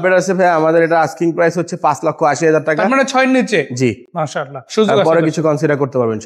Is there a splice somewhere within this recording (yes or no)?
no